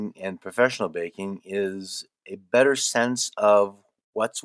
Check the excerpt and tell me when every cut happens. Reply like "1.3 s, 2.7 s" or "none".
none